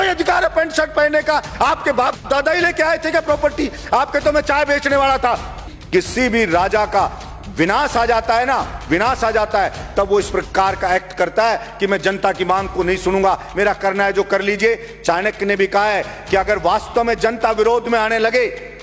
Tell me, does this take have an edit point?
yes; 1 cut; at 5.7 s

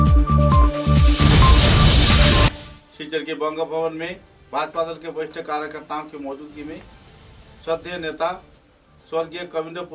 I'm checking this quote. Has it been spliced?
yes; 1 cut; at 2.7 s

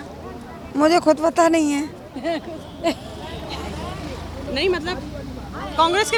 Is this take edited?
no; 0 cuts

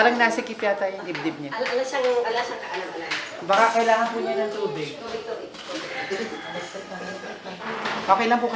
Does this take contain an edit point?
no; 0 cuts

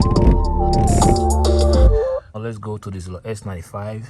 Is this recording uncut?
no; 1 cut; at 2.3 s

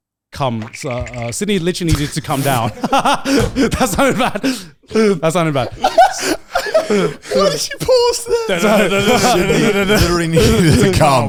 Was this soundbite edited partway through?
no; 0 cuts

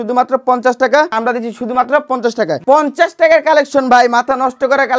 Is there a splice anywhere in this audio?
yes; 2 cuts; at 1.1 s, 2.6 s

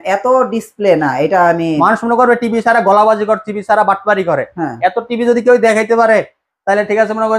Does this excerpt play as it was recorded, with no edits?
yes; 0 cuts

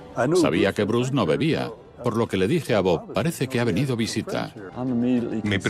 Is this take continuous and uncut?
no; 1 cut; at 4.6 s

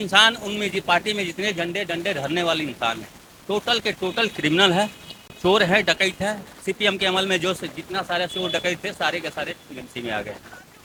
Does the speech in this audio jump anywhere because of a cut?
no; 0 cuts

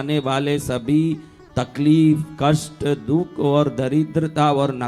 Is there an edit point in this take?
no; 0 cuts

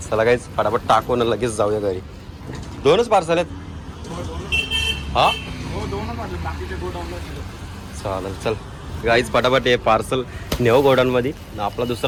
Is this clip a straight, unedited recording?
yes; 0 cuts

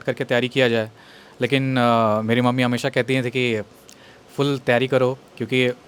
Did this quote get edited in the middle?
no; 0 cuts

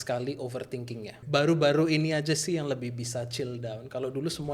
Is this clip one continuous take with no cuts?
no; 1 cut; at 1.2 s

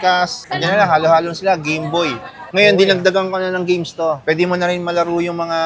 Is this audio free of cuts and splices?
no; 1 cut; at 2.4 s

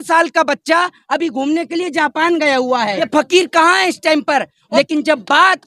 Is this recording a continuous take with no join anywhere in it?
no; 2 cuts; at 3.1 s, 4.6 s

